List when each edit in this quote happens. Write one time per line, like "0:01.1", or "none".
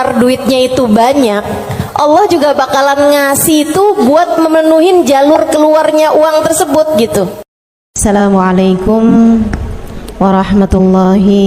0:08.0